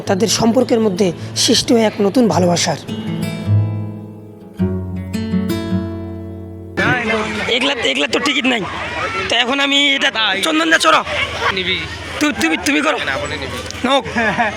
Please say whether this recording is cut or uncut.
uncut